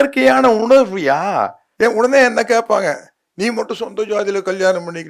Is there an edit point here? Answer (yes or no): yes